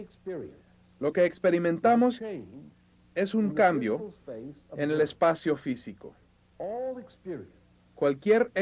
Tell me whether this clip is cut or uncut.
uncut